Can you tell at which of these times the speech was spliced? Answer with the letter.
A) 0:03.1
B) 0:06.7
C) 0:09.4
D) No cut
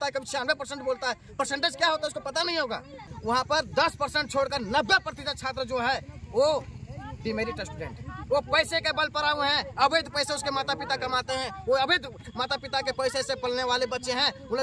A